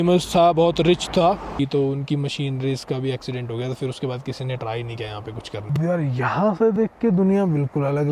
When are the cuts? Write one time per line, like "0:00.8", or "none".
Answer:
0:01.5
0:05.7